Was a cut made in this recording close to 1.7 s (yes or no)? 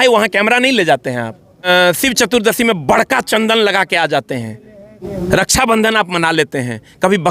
yes